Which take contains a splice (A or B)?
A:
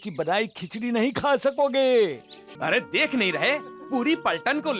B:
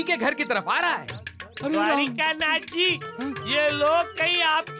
A